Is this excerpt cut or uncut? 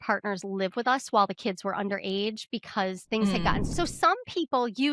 cut